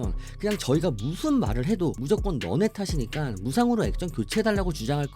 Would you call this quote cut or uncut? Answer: cut